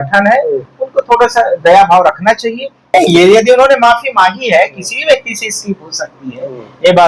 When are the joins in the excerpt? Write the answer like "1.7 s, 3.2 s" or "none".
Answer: 2.9 s